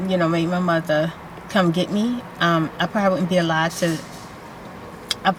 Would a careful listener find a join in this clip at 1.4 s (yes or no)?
no